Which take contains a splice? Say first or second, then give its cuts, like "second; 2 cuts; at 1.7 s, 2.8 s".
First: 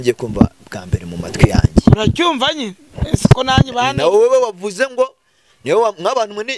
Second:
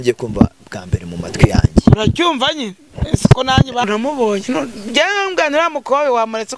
second; 1 cut; at 3.9 s